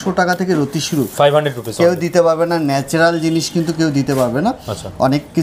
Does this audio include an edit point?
no; 0 cuts

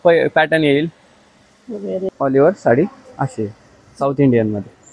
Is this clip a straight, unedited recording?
no; 1 cut; at 2.1 s

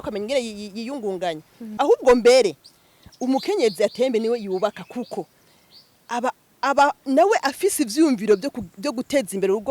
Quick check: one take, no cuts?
no; 1 cut; at 1.7 s

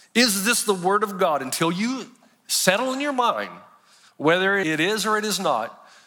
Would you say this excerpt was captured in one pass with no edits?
no; 1 cut; at 4.6 s

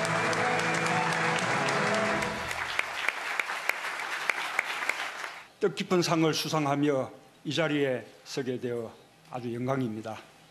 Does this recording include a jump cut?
yes; 1 cut; at 6.2 s

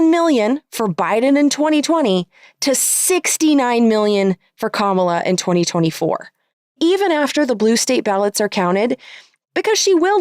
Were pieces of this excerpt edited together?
yes; 1 cut; at 6.8 s

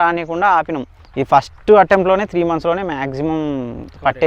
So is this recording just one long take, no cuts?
no; 1 cut; at 1.0 s

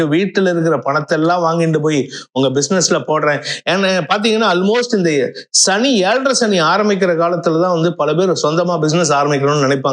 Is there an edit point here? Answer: no; 0 cuts

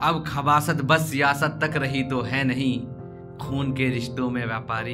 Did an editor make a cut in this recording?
no; 0 cuts

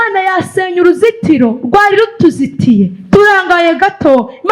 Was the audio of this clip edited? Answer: no; 0 cuts

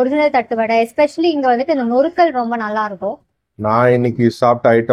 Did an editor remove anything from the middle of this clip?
yes; 1 cut; at 3.4 s

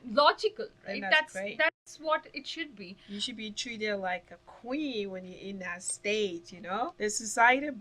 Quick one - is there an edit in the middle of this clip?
yes; 1 cut; at 6.9 s

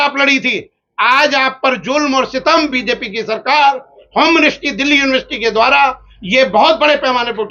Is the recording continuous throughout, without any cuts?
yes; 0 cuts

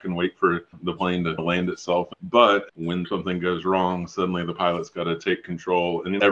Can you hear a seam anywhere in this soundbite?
yes; 2 cuts; at 2.1 s, 3.1 s

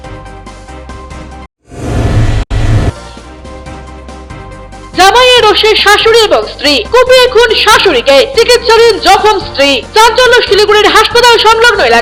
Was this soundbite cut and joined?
no; 0 cuts

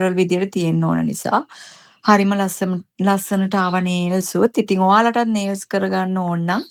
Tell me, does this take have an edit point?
no; 0 cuts

